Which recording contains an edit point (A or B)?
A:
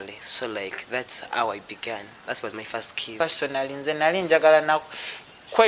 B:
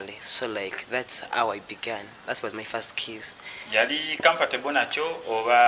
A